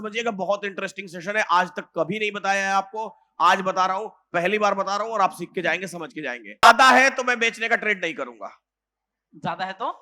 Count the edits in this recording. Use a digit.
1